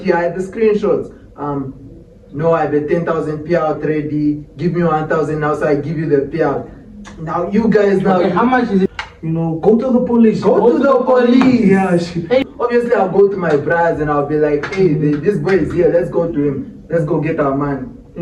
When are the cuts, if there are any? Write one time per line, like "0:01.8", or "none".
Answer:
0:08.9
0:12.4